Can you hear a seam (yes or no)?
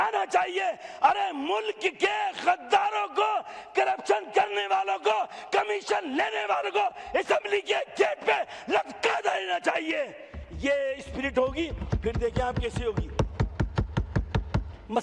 no